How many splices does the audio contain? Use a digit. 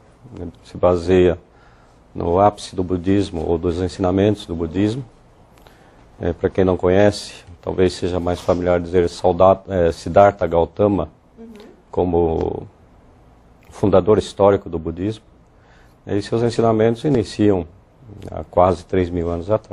1